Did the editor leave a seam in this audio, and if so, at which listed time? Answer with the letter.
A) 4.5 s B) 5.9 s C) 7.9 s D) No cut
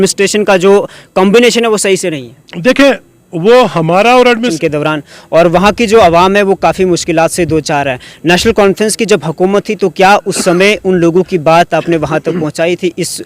A